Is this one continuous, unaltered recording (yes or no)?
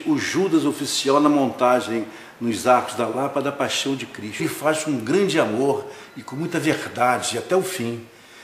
yes